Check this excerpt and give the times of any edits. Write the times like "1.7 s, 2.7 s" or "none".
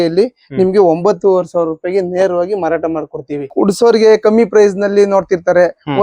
3.5 s